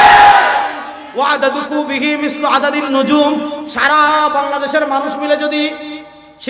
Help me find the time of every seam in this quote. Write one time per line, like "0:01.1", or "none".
0:01.0